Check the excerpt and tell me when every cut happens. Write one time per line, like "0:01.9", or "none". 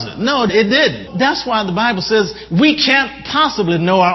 0:01.1

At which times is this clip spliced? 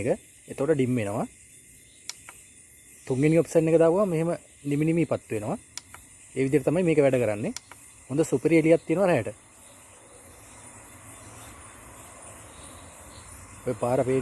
none

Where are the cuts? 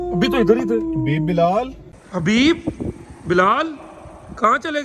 0:02.1

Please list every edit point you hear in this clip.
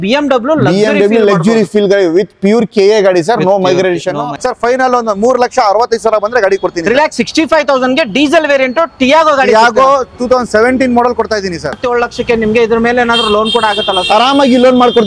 0:04.3
0:11.8

